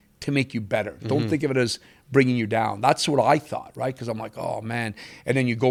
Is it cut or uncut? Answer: uncut